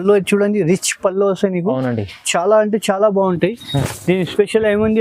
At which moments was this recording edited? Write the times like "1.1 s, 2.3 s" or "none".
3.9 s